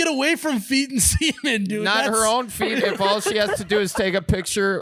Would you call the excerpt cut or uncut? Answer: uncut